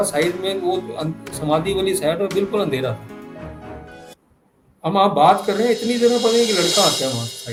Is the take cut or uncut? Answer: uncut